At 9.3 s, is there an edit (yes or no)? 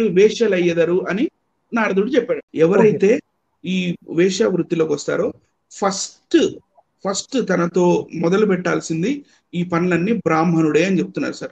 no